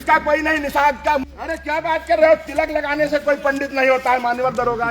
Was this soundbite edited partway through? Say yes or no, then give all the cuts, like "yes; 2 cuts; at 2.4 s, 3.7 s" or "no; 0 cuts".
yes; 1 cut; at 1.2 s